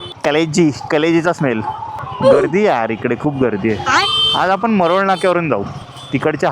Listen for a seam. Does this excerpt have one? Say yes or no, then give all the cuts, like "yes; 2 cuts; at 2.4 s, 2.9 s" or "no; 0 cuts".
no; 0 cuts